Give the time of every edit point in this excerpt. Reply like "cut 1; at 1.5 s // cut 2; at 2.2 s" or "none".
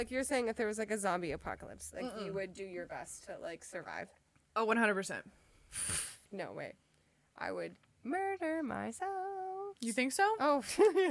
none